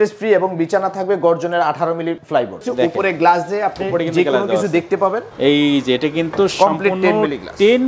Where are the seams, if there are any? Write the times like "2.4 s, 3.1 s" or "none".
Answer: 2.5 s, 5.3 s

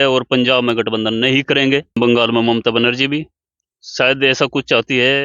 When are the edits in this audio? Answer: 2.0 s

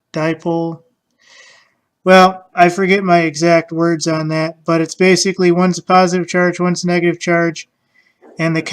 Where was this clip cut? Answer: 4.2 s

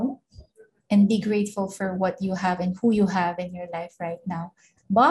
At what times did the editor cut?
none

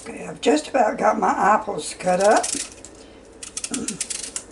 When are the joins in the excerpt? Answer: none

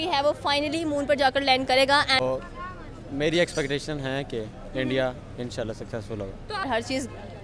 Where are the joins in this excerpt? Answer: 2.2 s, 6.7 s

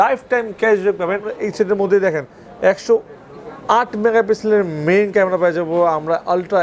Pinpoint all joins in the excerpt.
1.3 s

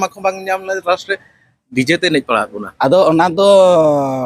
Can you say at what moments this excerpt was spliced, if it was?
2.6 s

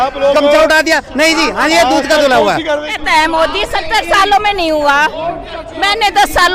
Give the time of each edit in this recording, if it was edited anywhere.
2.9 s

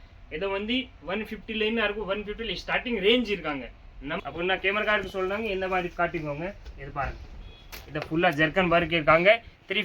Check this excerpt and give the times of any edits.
4.2 s

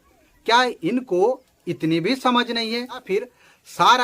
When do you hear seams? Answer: 3.0 s

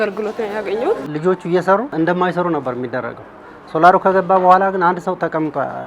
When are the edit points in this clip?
1.0 s, 1.9 s

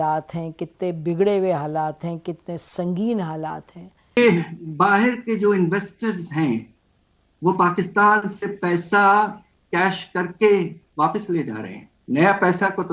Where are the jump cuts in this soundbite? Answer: 4.2 s

